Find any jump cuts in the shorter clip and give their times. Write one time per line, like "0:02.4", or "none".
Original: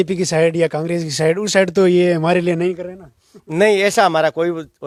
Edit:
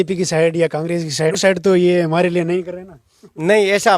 0:01.4